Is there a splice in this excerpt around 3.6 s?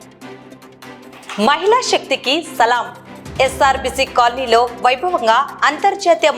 no; 1 cut; at 1.1 s

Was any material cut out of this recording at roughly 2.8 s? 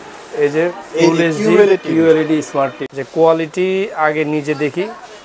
yes; 1 cut; at 2.8 s

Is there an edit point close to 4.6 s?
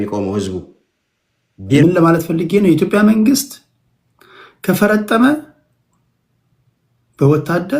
no; 1 cut; at 1.8 s

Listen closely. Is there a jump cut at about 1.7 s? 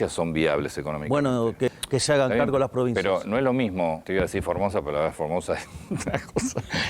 yes; 2 cuts; at 1.7 s, 4.0 s

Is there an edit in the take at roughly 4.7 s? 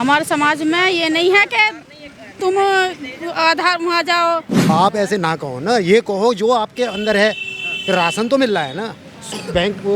yes; 1 cut; at 4.7 s

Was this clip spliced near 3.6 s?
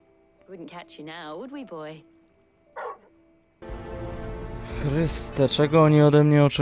yes; 1 cut; at 3.6 s

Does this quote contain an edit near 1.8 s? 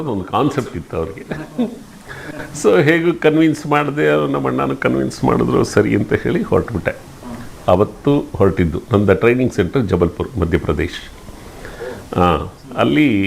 no; 0 cuts

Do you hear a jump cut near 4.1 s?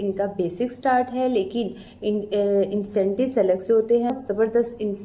yes; 1 cut; at 4.1 s

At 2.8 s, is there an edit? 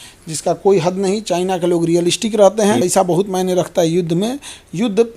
yes; 1 cut; at 2.8 s

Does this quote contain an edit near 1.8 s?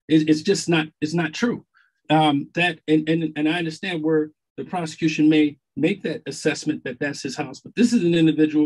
no; 0 cuts

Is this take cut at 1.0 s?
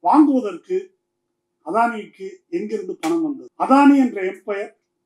no; 1 cut; at 3.5 s

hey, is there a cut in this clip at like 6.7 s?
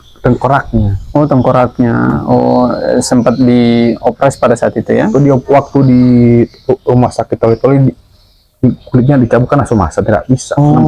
no; 0 cuts

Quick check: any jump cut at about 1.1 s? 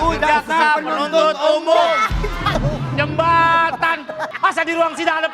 no; 2 cuts; at 2.5 s, 4.3 s

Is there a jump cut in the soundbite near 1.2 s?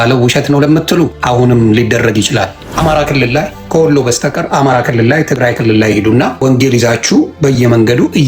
yes; 4 cuts; at 1.2 s, 2.6 s, 3.6 s, 6.4 s

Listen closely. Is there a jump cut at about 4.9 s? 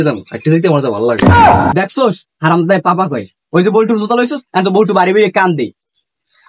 no; 2 cuts; at 1.2 s, 1.7 s

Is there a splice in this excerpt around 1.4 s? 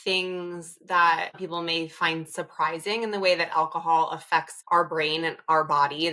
yes; 1 cut; at 1.4 s

